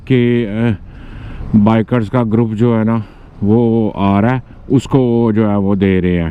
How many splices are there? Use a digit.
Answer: 0